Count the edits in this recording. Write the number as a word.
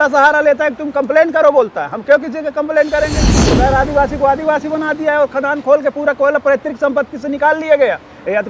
one